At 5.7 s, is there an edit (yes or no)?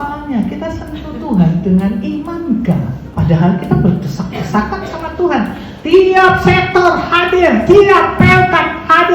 no